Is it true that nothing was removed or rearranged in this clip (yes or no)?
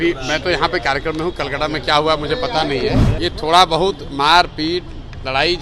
no